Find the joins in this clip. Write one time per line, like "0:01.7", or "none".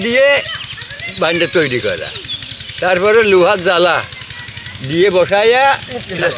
none